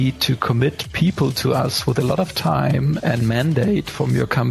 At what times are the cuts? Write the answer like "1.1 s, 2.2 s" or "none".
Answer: 3.0 s